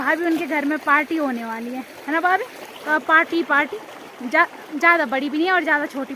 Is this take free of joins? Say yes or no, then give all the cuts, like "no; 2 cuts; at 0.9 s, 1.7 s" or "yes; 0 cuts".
yes; 0 cuts